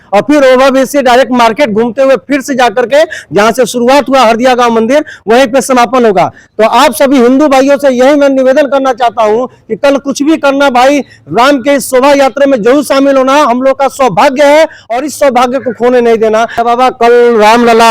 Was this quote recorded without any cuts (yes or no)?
no